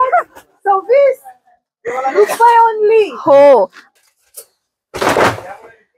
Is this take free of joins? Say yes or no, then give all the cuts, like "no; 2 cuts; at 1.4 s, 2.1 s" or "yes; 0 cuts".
no; 1 cut; at 3.8 s